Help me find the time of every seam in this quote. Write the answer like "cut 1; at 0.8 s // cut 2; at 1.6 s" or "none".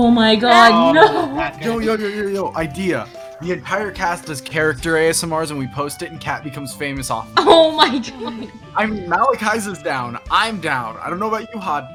none